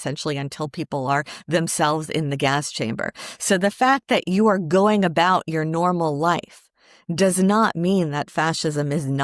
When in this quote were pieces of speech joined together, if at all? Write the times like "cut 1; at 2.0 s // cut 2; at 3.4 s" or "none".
none